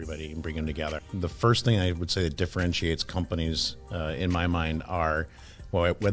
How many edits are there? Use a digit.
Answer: 1